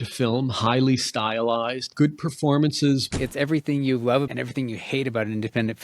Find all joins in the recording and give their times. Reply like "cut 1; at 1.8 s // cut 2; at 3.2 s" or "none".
cut 1; at 1.9 s // cut 2; at 3.1 s // cut 3; at 4.3 s